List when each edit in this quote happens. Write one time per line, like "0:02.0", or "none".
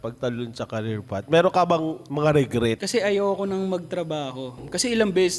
0:02.8
0:04.6